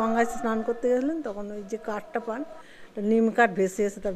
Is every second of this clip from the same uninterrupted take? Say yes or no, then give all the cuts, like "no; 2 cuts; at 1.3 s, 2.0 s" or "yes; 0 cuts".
yes; 0 cuts